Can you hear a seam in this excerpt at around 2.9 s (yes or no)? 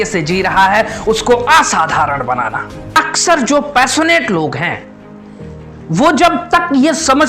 yes